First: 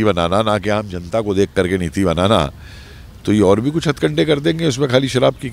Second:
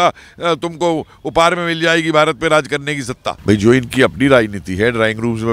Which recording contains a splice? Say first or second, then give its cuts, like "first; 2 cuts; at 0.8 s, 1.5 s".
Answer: second; 1 cut; at 3.3 s